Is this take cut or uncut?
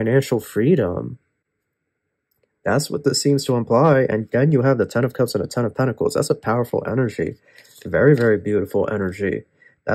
uncut